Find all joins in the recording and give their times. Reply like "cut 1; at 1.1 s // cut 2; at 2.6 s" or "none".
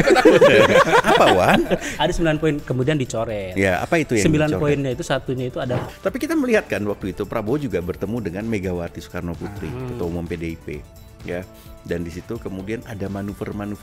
cut 1; at 1.9 s // cut 2; at 5.8 s